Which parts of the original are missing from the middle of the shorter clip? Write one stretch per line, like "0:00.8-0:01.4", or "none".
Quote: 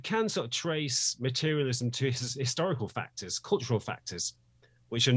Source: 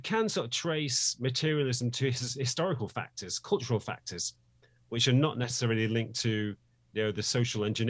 none